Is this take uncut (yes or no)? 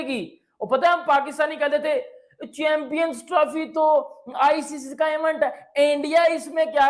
yes